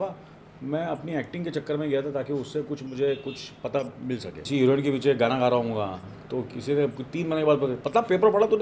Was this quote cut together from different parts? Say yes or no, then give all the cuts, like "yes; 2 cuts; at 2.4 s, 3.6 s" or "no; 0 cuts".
yes; 1 cut; at 4.3 s